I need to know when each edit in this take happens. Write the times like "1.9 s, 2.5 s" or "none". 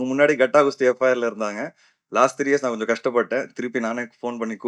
none